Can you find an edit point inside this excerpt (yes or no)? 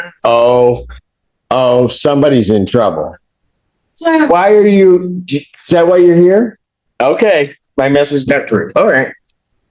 no